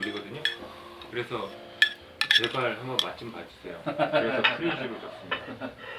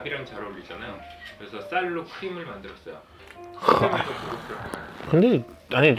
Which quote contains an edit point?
first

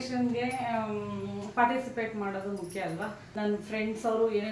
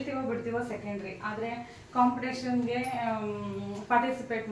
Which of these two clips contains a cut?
first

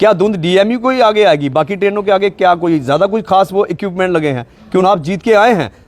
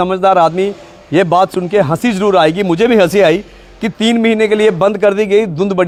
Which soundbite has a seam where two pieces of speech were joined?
first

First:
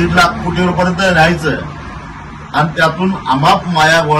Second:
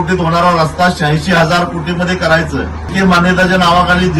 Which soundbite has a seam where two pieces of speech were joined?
second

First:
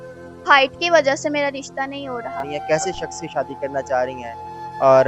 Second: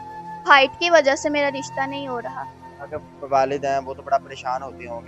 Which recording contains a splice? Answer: first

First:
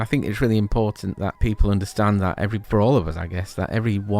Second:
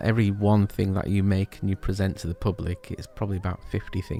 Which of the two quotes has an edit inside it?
first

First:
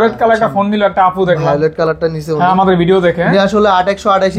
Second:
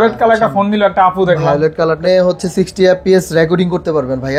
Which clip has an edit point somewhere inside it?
second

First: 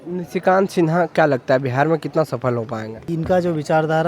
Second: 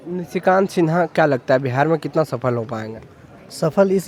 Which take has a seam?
first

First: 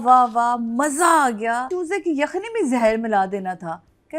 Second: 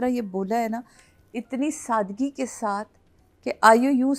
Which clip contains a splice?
first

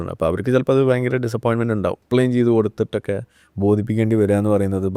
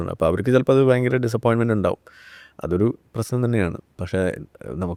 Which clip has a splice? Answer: first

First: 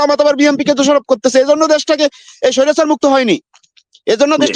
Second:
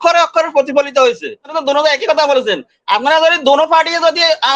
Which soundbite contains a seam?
second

